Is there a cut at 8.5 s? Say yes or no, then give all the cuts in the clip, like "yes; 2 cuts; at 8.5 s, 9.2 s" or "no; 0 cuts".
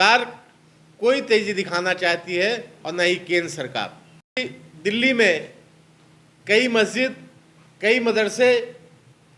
no; 1 cut; at 4.4 s